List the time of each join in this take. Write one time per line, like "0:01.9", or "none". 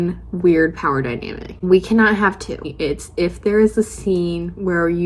0:02.7